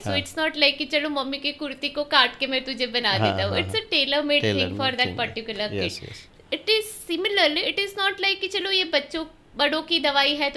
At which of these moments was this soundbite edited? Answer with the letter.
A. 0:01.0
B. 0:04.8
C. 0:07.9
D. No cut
D